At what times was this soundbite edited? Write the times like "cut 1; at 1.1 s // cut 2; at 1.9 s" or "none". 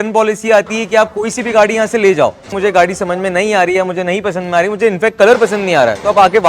cut 1; at 2.5 s